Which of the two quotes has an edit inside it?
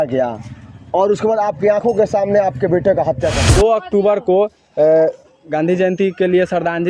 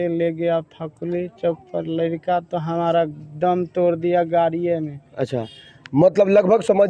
first; 1 cut; at 3.4 s

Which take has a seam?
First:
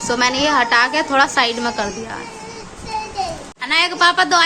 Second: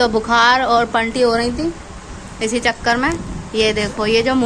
first; 1 cut; at 3.5 s

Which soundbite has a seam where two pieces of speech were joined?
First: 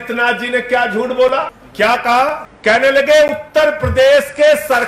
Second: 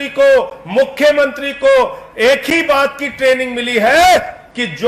first; 2 cuts; at 1.6 s, 2.5 s

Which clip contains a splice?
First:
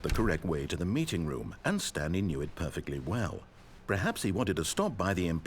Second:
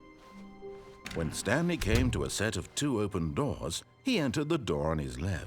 second; 1 cut; at 1.1 s

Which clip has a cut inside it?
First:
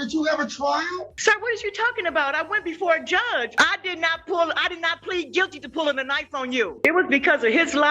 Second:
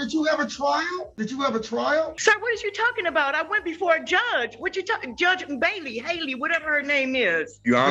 first; 3 cuts; at 1.1 s, 3.5 s, 6.7 s

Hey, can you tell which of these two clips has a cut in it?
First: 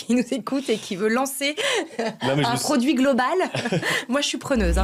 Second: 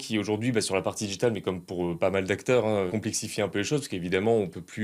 second; 1 cut; at 2.9 s

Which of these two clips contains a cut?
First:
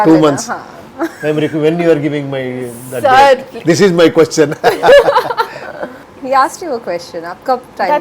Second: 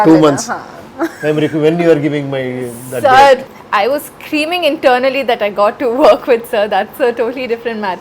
second; 1 cut; at 3.5 s

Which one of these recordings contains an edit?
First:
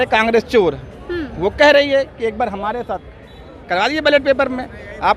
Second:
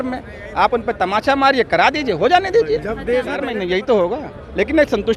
second; 1 cut; at 3.5 s

